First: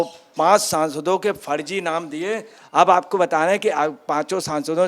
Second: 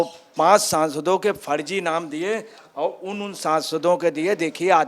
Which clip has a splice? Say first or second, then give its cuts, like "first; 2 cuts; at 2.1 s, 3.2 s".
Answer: first; 1 cut; at 2.6 s